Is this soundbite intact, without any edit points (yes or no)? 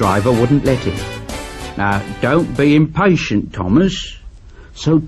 no